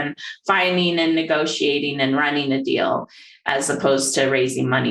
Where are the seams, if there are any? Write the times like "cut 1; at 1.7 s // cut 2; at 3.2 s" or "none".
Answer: none